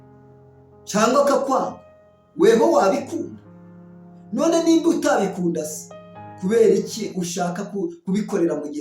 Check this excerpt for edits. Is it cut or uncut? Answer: cut